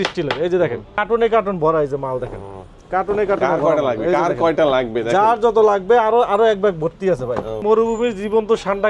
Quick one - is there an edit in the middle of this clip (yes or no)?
yes